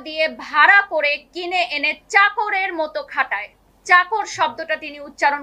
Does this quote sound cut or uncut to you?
uncut